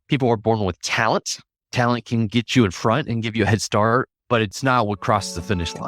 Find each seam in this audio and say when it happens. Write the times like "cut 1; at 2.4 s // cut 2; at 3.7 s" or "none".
cut 1; at 2.5 s // cut 2; at 4.5 s